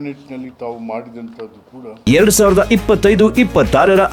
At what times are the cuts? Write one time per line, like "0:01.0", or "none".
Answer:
0:02.0